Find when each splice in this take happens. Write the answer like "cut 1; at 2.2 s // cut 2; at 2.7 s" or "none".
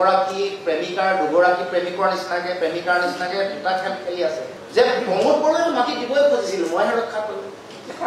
none